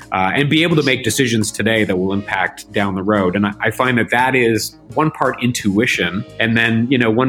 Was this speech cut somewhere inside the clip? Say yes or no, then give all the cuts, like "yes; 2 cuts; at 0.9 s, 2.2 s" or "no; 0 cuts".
yes; 2 cuts; at 4.8 s, 6.2 s